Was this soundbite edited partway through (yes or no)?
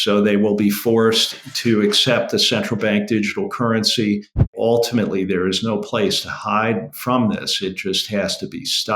yes